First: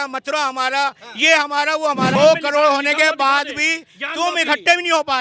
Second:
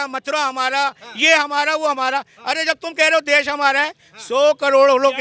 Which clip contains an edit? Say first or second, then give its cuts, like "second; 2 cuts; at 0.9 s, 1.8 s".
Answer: first; 1 cut; at 2.1 s